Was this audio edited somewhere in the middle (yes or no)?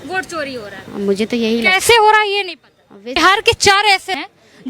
yes